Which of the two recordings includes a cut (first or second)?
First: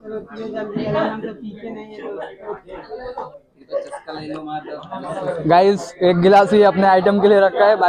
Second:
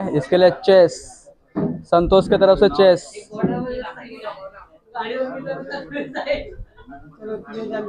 first